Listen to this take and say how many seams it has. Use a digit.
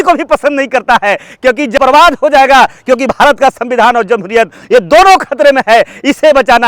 1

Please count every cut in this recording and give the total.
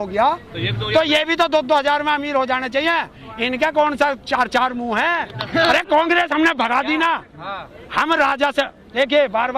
1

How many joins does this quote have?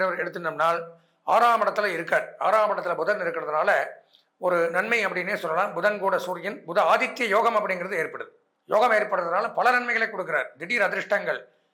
0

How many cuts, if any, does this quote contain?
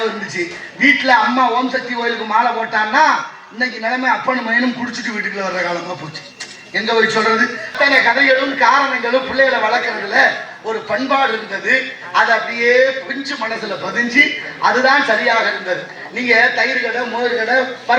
1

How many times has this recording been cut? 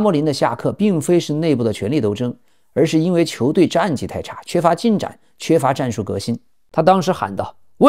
1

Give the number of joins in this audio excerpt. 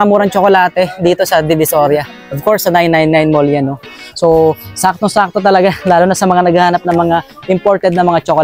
0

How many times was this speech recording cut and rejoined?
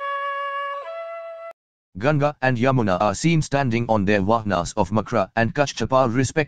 1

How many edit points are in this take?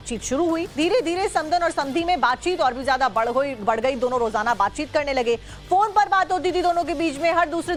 0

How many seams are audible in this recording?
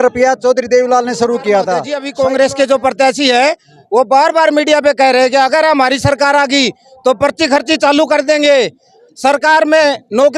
1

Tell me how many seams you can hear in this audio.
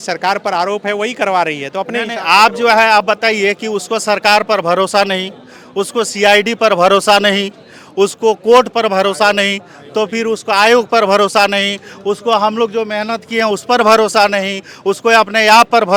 0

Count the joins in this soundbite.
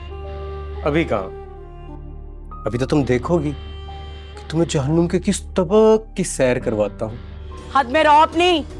1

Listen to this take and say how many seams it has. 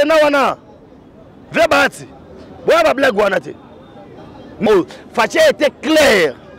1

